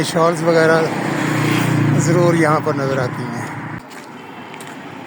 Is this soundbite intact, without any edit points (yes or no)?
no